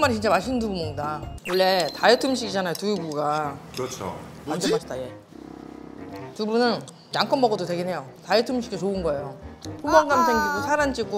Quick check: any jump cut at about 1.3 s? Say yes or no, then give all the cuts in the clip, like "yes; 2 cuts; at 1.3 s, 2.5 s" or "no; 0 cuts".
yes; 1 cut; at 1.3 s